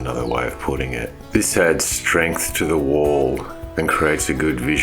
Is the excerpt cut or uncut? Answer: cut